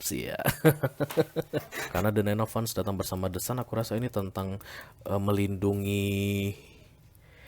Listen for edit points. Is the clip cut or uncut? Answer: cut